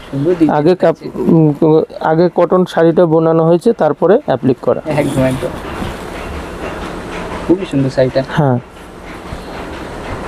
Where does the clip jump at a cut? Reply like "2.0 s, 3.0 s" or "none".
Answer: none